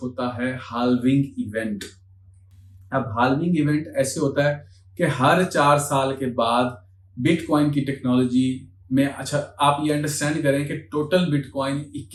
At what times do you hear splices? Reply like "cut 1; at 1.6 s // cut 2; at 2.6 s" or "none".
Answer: none